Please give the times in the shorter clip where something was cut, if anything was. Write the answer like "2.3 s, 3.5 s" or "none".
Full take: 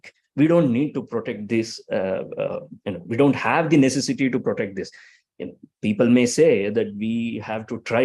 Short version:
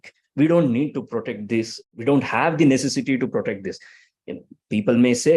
1.8 s